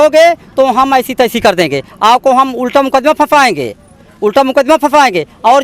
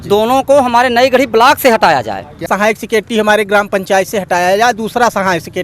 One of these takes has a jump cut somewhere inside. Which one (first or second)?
second